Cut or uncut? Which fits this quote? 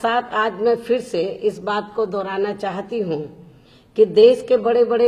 uncut